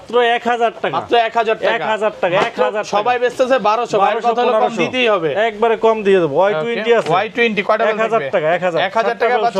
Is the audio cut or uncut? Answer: uncut